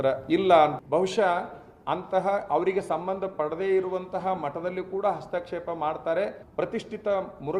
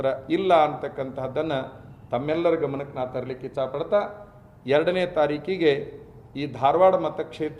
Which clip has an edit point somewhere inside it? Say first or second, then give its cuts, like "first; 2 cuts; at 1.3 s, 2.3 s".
first; 2 cuts; at 0.8 s, 6.4 s